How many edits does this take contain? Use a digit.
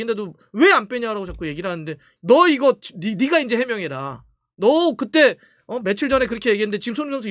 1